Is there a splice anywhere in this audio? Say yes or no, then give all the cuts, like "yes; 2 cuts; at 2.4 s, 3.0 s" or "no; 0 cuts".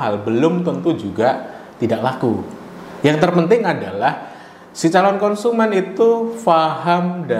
no; 0 cuts